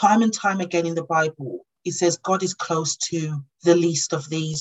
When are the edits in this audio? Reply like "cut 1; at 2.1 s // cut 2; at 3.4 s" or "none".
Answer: none